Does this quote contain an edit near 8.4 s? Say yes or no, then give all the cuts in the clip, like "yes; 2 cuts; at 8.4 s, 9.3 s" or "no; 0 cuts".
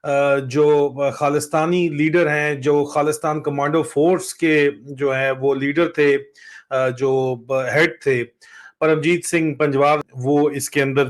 no; 1 cut; at 10.1 s